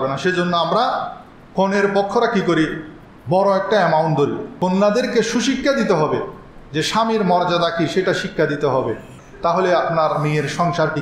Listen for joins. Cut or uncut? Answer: cut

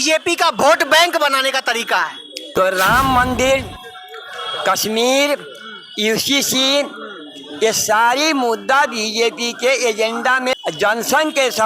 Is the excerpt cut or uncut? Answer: cut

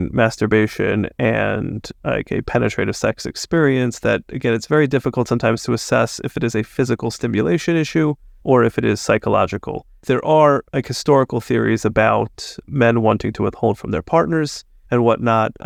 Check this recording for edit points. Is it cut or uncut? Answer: uncut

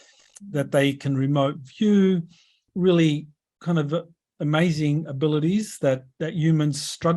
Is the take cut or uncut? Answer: cut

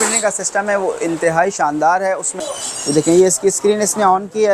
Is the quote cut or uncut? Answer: cut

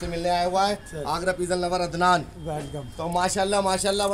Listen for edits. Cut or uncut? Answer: uncut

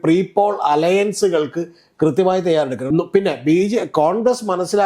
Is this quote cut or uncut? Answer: cut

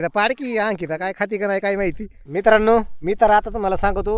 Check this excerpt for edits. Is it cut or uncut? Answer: cut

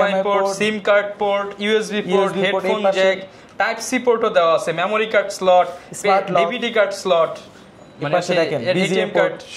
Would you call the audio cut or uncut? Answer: uncut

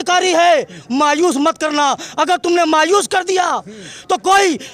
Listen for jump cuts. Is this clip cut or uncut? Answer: uncut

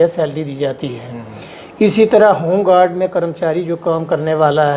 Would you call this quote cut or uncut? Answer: uncut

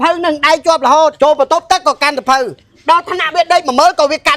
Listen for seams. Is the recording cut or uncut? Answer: cut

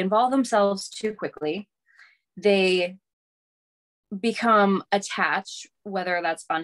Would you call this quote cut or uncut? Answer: uncut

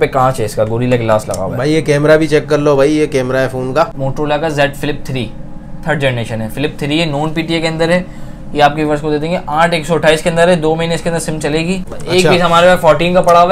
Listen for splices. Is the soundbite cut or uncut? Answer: cut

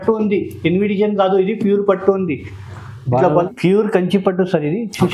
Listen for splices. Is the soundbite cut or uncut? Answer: cut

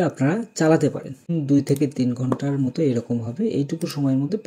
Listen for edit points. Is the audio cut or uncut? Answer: cut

